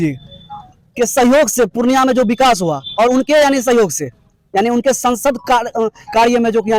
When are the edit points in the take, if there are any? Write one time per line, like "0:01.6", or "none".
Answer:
none